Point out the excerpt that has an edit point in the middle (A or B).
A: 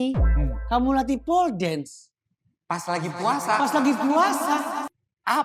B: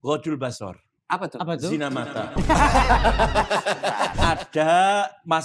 B